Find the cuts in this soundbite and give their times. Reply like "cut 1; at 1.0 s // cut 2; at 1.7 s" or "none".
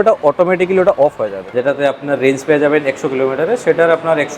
cut 1; at 1.4 s